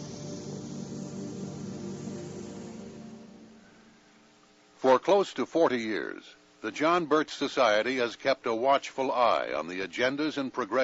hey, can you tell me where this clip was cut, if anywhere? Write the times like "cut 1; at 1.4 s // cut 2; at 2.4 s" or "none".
cut 1; at 8.5 s